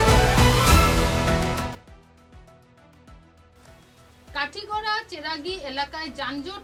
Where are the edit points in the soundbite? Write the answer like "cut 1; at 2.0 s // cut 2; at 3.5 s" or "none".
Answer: none